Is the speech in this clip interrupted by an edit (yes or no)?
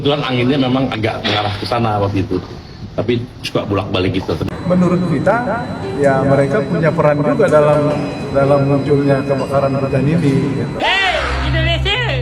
yes